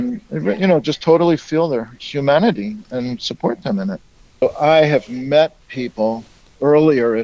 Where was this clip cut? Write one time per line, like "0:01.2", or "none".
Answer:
0:04.4